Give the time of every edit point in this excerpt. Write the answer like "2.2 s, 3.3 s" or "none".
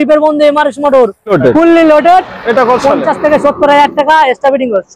1.3 s